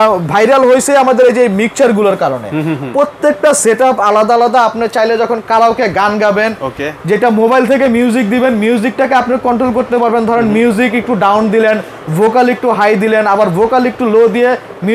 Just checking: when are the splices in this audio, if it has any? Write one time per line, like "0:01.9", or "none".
none